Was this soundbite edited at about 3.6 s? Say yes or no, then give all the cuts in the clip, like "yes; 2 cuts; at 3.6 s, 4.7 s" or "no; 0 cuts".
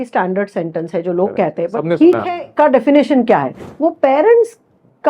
yes; 1 cut; at 3.6 s